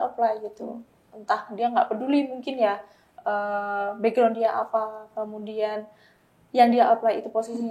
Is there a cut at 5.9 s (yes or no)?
no